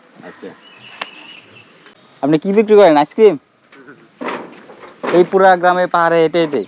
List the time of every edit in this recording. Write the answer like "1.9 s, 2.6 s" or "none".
2.0 s